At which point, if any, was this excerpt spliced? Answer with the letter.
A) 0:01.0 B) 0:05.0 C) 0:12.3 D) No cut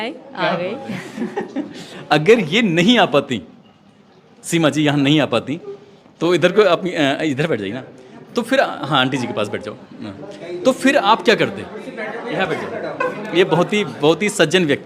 A